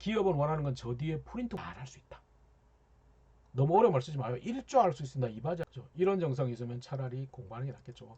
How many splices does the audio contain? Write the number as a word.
two